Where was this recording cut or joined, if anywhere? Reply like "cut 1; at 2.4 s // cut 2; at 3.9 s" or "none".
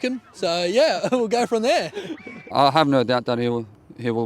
cut 1; at 2.4 s

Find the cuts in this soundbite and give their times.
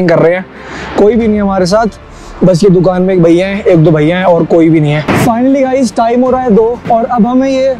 cut 1; at 5.1 s

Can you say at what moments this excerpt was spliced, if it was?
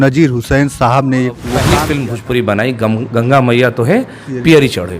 cut 1; at 1.5 s

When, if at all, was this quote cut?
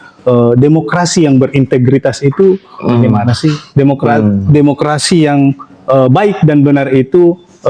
none

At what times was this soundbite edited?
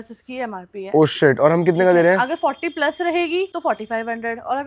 cut 1; at 3.5 s

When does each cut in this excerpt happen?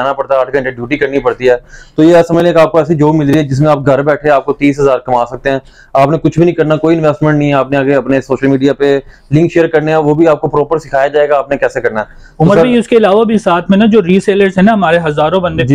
none

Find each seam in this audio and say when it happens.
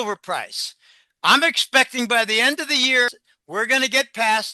cut 1; at 3.2 s

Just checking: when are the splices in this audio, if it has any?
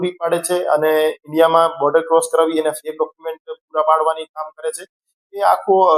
none

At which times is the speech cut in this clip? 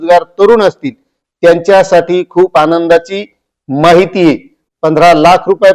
cut 1; at 4.6 s

